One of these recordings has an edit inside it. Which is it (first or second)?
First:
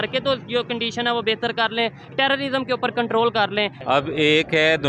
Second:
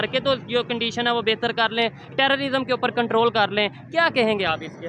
first